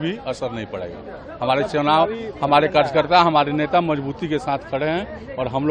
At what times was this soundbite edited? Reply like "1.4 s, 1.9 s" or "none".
none